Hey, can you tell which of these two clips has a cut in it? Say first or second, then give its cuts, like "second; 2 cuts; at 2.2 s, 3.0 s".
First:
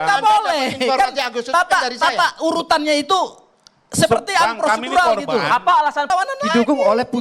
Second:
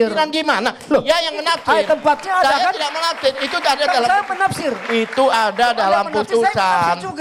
first; 1 cut; at 6.1 s